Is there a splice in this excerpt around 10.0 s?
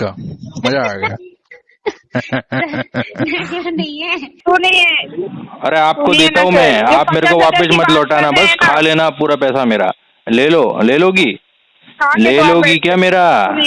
no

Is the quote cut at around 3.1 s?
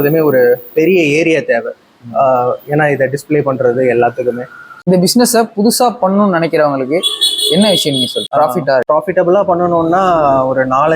no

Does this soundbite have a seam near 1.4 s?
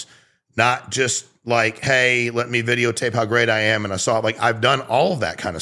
no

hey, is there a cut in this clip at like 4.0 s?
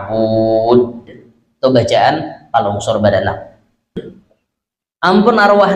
yes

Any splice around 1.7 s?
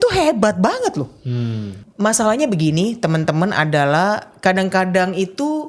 yes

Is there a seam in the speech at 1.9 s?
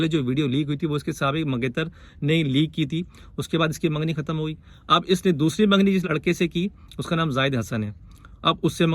no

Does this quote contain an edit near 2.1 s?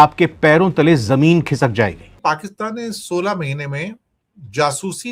yes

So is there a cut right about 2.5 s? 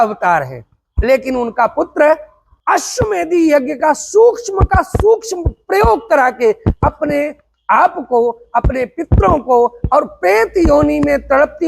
yes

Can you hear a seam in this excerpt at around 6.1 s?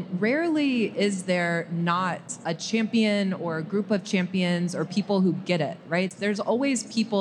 yes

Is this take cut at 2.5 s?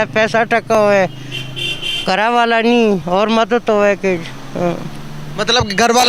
no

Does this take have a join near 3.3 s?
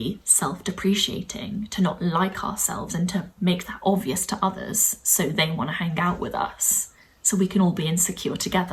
no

